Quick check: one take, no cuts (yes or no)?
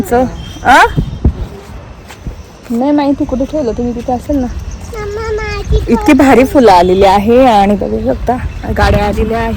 yes